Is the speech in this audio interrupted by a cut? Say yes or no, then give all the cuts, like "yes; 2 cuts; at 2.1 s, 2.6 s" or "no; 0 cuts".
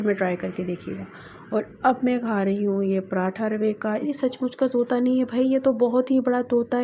yes; 1 cut; at 4.1 s